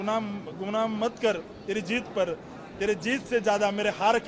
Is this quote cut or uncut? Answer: uncut